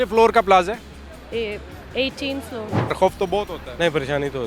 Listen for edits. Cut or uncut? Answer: cut